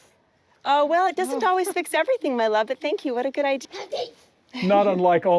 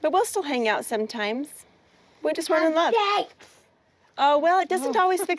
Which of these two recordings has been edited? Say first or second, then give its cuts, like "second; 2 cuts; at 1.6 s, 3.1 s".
first; 1 cut; at 3.6 s